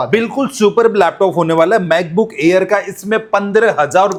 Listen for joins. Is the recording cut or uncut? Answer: uncut